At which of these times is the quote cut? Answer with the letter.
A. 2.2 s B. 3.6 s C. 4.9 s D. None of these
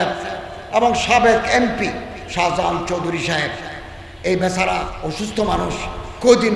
C